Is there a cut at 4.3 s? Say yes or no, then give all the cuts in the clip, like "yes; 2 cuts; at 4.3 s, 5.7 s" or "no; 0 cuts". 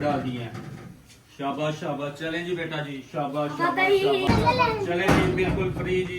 yes; 1 cut; at 4.3 s